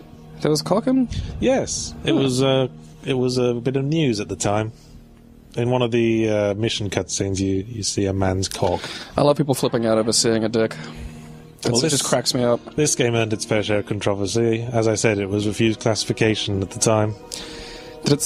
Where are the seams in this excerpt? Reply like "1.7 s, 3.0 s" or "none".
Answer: 10.4 s